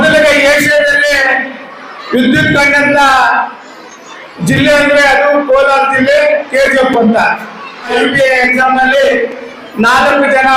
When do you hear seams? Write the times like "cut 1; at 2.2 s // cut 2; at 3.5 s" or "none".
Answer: cut 1; at 7.9 s